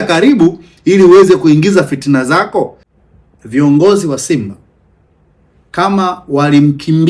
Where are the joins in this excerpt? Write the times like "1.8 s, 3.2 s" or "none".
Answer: 2.8 s